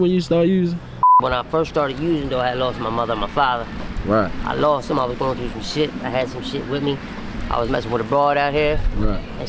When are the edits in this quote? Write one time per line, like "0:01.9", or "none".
0:01.1